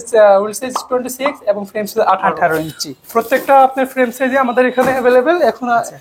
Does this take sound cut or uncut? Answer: uncut